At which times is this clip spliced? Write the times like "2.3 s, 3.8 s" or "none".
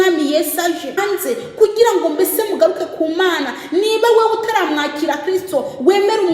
1.0 s